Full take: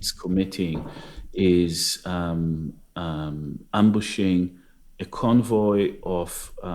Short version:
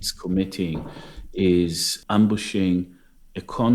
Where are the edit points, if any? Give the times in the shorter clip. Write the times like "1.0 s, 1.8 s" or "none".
1.9 s